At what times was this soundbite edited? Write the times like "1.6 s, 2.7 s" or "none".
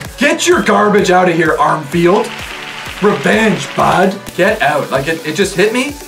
4.2 s